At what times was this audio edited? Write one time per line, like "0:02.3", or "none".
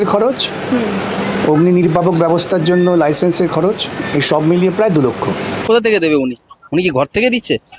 0:05.6